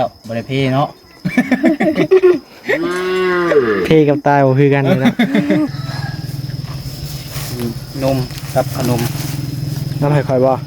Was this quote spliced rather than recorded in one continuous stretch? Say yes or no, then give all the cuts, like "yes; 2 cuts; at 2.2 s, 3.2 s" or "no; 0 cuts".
yes; 1 cut; at 5.7 s